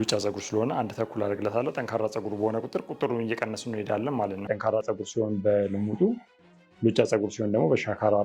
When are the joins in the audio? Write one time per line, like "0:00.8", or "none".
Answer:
0:04.5